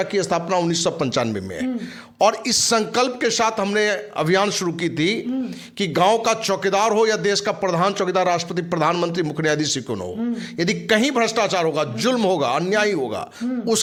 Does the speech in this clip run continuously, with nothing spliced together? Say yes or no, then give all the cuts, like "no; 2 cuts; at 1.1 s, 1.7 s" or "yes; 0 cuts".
yes; 0 cuts